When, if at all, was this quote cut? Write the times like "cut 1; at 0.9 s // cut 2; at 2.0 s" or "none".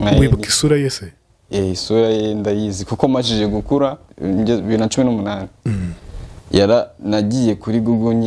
cut 1; at 4.1 s

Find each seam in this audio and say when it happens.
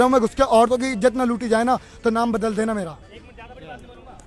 none

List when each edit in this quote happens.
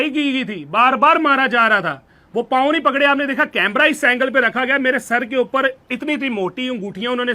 none

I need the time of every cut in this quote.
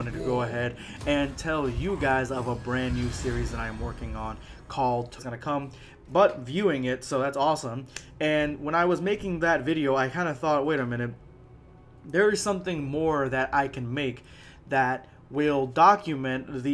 none

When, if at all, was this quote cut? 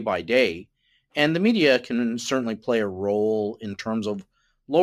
none

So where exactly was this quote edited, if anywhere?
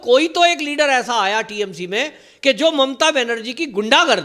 none

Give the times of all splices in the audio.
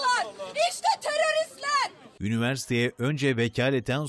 cut 1; at 2.0 s

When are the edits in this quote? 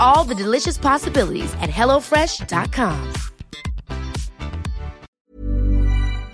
cut 1; at 5.1 s

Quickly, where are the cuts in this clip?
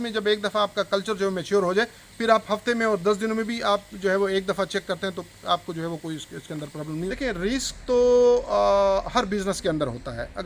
cut 1; at 7.1 s

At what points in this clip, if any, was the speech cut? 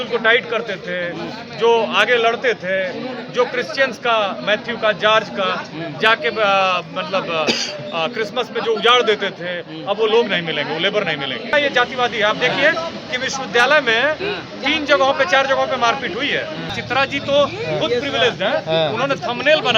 cut 1; at 11.5 s // cut 2; at 16.7 s

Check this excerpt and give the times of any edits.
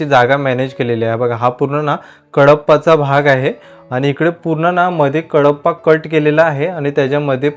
none

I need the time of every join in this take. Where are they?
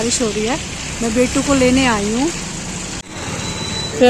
cut 1; at 3.1 s

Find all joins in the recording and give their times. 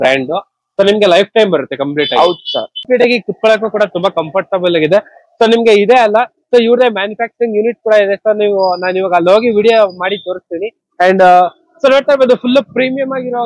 cut 1; at 2.8 s

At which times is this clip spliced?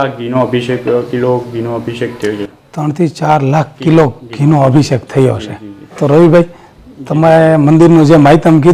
none

